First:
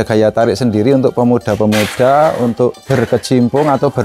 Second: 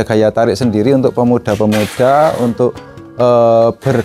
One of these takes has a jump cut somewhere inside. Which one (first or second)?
first